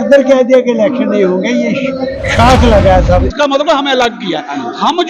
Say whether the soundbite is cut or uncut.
cut